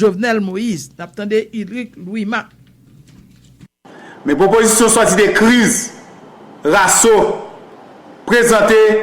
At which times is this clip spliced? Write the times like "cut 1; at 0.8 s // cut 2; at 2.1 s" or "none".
cut 1; at 3.8 s